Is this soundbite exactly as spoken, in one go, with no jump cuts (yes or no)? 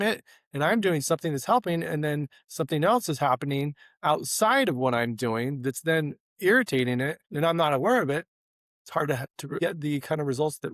no